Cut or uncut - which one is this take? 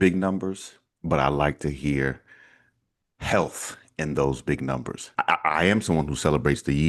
cut